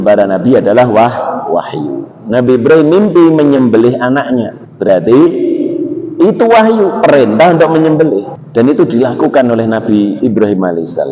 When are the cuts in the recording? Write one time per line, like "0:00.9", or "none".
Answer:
0:04.6
0:08.4